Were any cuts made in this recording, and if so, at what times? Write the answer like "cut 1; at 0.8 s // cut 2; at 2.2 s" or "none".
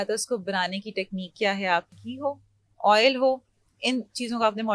cut 1; at 1.9 s